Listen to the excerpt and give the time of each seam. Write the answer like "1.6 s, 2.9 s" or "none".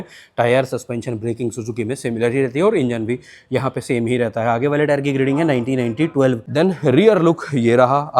6.4 s